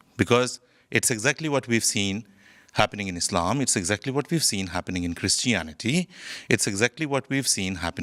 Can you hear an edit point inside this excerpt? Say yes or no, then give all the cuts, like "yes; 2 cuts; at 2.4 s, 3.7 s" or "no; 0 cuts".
no; 0 cuts